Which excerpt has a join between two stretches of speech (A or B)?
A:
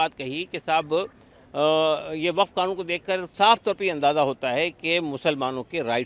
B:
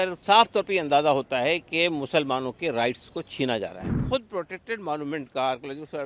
B